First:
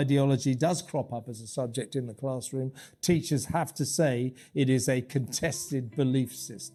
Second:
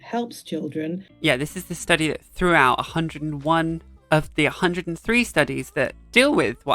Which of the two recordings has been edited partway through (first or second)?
second